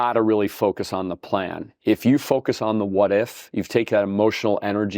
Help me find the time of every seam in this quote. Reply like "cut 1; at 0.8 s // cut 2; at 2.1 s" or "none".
none

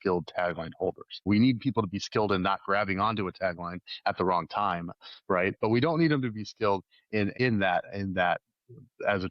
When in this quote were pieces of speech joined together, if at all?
cut 1; at 1.2 s // cut 2; at 7.3 s

